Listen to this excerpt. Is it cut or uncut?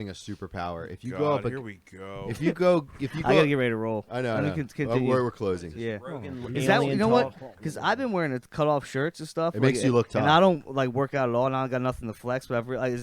uncut